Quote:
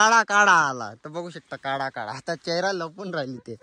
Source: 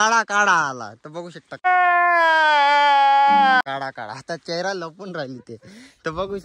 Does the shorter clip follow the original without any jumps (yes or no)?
no